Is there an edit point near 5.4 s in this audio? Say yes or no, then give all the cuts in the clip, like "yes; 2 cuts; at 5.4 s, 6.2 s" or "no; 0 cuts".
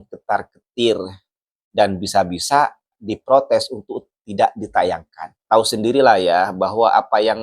yes; 1 cut; at 5.4 s